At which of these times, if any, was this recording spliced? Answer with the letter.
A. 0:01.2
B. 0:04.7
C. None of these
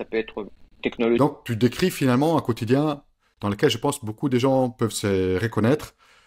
A